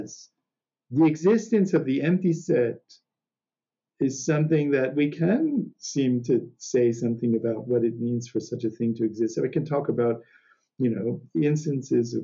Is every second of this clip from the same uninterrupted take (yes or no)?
yes